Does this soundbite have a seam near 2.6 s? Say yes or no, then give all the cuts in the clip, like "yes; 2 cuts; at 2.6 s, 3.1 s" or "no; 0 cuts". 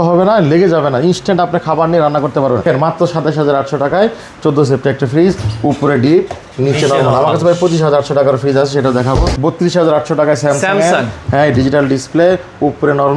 yes; 2 cuts; at 2.6 s, 9.3 s